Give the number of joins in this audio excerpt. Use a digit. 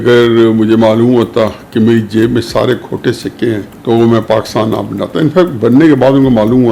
1